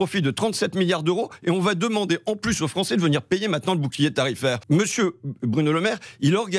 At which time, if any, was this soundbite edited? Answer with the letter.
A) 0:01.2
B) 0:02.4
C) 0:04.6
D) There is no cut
C